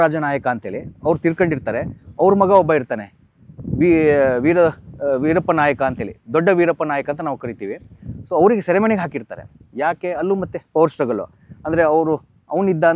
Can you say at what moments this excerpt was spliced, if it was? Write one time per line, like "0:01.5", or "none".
none